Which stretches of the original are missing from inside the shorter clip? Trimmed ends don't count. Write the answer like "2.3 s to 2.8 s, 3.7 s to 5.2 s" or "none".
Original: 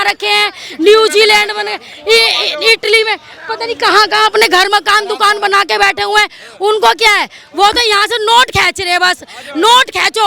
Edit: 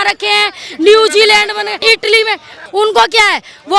1.8 s to 2.6 s, 3.3 s to 6.4 s